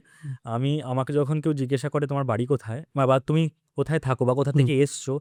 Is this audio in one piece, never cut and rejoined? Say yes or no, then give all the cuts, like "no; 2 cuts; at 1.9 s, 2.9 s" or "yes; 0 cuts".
yes; 0 cuts